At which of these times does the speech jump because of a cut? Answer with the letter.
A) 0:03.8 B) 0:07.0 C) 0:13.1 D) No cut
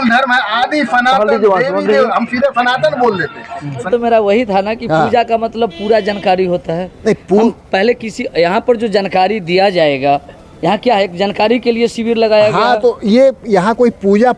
A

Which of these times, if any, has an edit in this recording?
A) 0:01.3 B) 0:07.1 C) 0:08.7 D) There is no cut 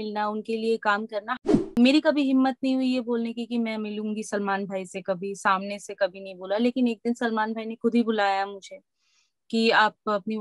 A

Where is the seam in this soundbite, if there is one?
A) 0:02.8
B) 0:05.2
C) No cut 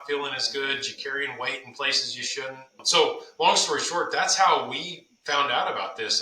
A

